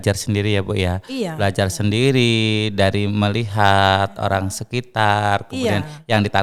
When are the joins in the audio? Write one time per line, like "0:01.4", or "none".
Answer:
none